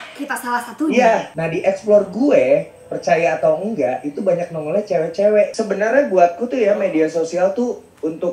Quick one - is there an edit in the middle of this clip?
yes; 2 cuts; at 1.3 s, 5.5 s

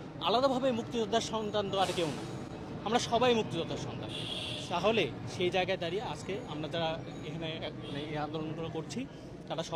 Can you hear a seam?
no; 0 cuts

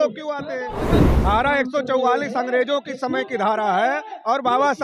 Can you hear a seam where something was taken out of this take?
yes; 1 cut; at 1.1 s

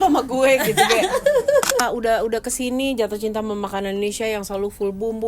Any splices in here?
yes; 1 cut; at 1.8 s

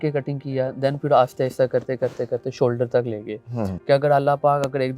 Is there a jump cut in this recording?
yes; 1 cut; at 3.7 s

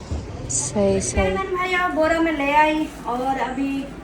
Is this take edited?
yes; 1 cut; at 1.4 s

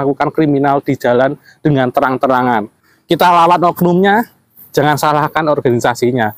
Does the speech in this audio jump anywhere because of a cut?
yes; 1 cut; at 2.9 s

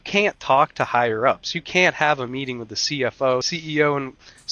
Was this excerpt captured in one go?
no; 1 cut; at 3.5 s

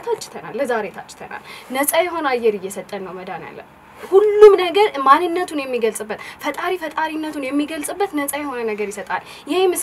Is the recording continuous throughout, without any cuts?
yes; 0 cuts

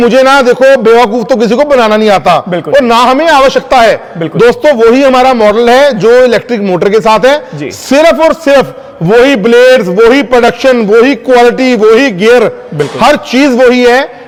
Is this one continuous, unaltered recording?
yes; 0 cuts

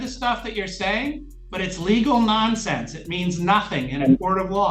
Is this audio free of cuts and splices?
yes; 0 cuts

